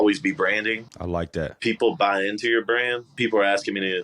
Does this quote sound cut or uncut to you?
cut